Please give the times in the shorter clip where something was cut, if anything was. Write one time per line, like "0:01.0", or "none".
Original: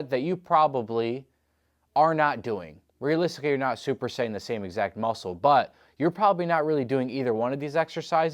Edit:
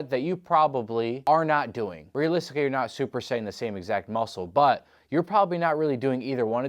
0:01.2
0:02.0